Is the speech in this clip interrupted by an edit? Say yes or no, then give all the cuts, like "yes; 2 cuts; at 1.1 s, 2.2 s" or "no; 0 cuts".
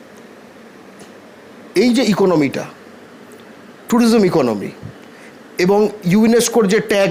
no; 0 cuts